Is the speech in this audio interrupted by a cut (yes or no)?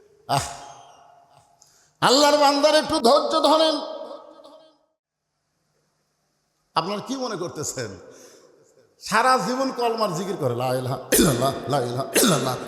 yes